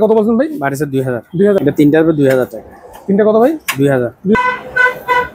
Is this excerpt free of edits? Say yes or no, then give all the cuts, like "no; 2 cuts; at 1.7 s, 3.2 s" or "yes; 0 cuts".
no; 2 cuts; at 1.6 s, 4.4 s